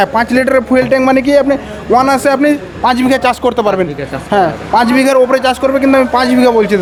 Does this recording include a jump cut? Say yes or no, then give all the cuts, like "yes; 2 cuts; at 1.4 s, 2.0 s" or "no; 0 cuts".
no; 0 cuts